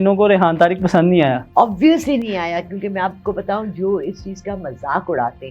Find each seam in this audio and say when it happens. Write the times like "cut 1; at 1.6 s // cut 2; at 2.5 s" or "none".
cut 1; at 1.4 s